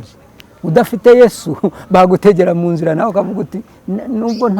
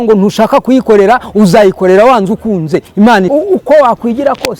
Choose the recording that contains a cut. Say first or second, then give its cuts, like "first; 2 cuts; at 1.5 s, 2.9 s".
second; 1 cut; at 3.3 s